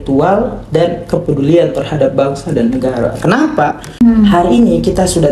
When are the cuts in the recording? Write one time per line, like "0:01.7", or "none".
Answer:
0:03.8